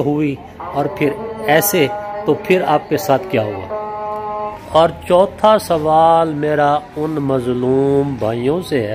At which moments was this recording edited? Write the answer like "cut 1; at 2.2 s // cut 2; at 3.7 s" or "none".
cut 1; at 4.5 s

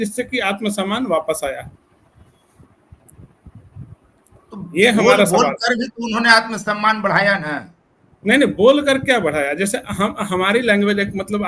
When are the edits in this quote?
none

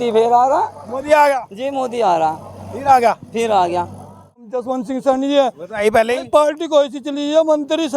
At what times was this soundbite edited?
cut 1; at 4.5 s

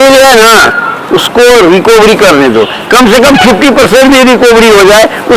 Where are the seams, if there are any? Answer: none

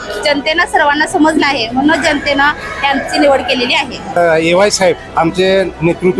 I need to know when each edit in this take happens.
cut 1; at 4.1 s // cut 2; at 5.0 s

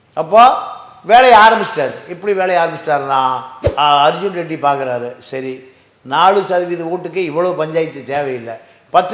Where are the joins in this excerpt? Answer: cut 1; at 3.5 s

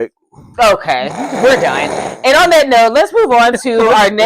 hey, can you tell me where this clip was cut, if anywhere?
none

